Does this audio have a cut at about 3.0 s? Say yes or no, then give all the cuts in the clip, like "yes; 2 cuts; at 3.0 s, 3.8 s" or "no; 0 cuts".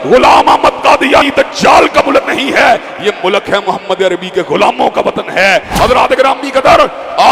no; 2 cuts; at 1.3 s, 5.7 s